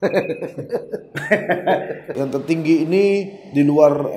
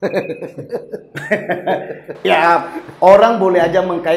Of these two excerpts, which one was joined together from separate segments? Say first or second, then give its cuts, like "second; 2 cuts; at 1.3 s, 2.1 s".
first; 1 cut; at 2.1 s